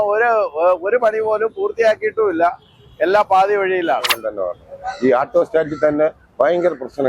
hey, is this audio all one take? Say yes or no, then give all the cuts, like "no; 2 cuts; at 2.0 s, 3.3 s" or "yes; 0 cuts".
no; 1 cut; at 4.2 s